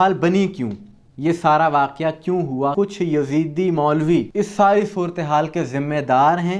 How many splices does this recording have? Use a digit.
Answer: 2